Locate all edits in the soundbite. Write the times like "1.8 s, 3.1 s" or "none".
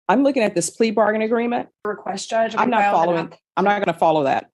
1.9 s